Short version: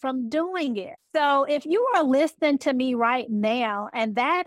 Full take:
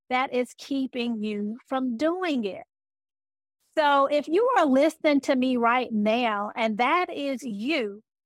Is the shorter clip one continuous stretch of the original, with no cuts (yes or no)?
no